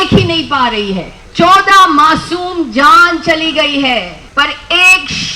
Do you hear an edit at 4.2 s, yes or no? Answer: yes